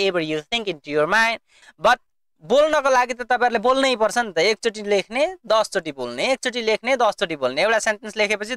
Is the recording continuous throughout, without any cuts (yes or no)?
no